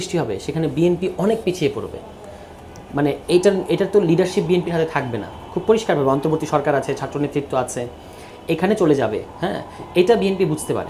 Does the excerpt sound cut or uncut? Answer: uncut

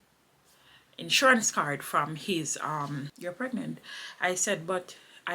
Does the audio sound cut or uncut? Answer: cut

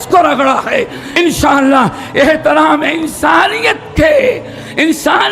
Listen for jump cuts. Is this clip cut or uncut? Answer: cut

